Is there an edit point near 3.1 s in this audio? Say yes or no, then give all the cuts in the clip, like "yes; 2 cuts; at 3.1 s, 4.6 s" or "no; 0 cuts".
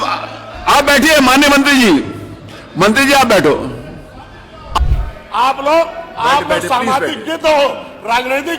no; 1 cut; at 4.8 s